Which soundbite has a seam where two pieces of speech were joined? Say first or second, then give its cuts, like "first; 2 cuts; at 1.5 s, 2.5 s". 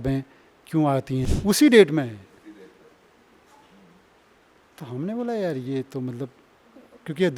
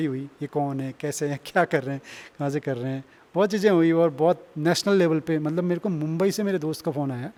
first; 1 cut; at 1.3 s